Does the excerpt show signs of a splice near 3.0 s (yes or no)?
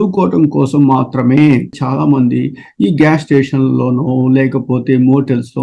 no